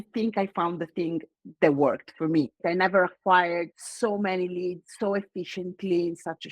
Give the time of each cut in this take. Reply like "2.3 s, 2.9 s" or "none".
2.6 s, 3.8 s, 4.9 s